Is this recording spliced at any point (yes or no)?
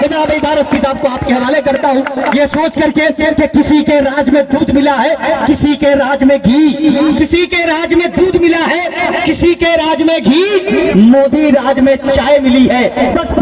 no